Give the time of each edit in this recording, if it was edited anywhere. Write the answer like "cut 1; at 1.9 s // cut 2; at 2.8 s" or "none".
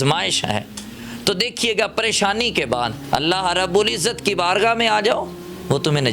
cut 1; at 3.0 s